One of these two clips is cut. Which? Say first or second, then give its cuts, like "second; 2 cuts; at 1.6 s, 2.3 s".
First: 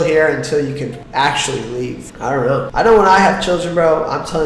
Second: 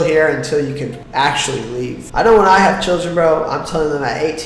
second; 1 cut; at 2.1 s